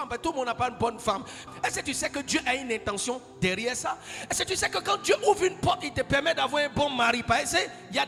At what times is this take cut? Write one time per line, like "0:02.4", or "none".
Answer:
none

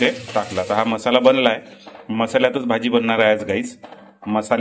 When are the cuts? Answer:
none

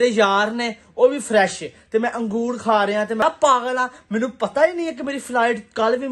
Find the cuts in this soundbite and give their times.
0:03.2

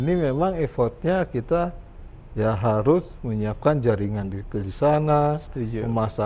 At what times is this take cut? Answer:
none

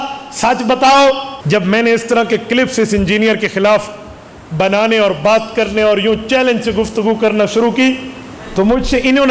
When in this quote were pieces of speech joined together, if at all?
0:01.3

